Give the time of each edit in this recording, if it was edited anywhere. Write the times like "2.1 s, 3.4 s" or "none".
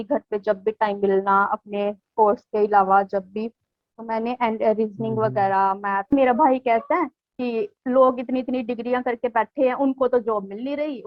6.1 s